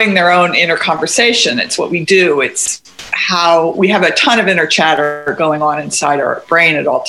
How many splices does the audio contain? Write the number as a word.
zero